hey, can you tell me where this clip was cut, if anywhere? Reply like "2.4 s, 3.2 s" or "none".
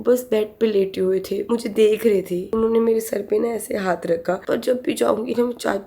2.5 s, 4.4 s